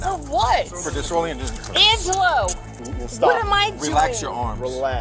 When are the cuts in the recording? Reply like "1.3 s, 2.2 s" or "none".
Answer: none